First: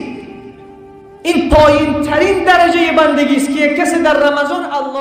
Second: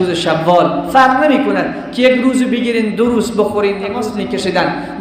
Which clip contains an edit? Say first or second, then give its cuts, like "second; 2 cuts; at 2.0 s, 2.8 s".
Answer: second; 1 cut; at 4.0 s